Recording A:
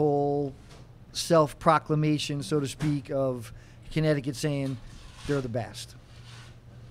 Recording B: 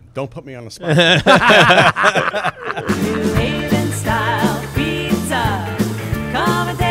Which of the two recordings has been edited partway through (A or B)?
B